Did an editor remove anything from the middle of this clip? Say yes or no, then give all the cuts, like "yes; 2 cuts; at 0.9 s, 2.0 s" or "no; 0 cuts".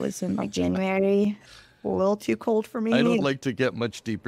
yes; 1 cut; at 1.5 s